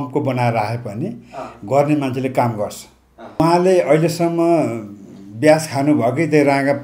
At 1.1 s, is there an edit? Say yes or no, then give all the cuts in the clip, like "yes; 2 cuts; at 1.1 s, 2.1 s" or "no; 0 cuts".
no; 1 cut; at 3.4 s